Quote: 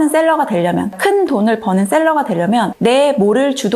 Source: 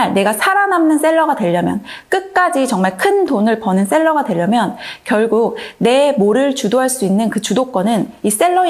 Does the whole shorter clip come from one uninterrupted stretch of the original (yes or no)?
no